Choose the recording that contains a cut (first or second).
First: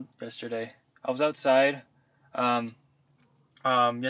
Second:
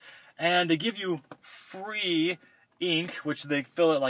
first